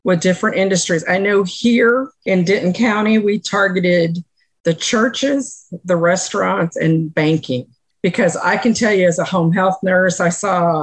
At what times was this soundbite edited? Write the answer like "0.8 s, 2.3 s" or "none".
none